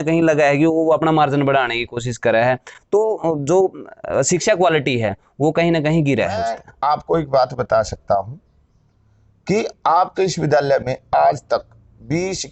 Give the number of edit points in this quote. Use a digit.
1